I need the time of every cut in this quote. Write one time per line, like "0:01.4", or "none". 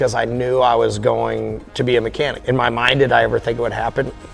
0:02.4